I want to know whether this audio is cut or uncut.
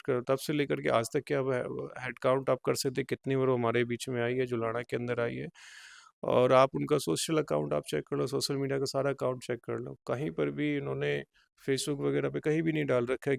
uncut